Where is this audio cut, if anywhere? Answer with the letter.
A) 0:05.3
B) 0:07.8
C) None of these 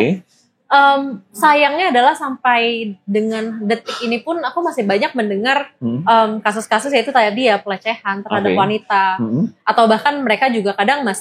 C